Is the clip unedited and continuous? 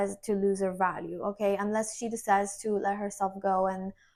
yes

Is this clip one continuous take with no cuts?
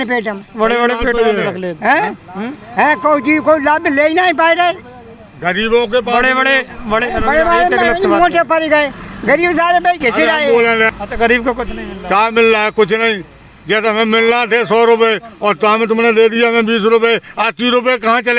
no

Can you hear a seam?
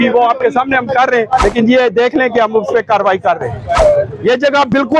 yes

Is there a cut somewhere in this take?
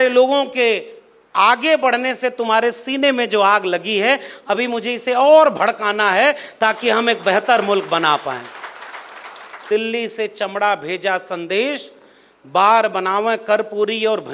yes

